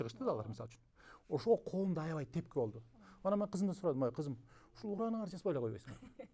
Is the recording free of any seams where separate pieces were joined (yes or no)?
yes